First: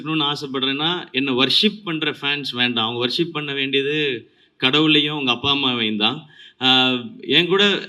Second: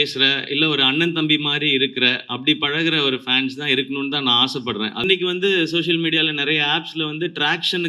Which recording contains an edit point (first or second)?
second